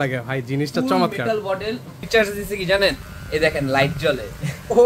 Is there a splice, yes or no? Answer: yes